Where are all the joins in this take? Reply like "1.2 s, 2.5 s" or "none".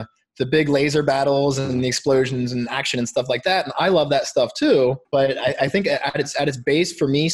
5.0 s